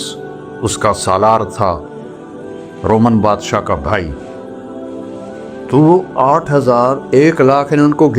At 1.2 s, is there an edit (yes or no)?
no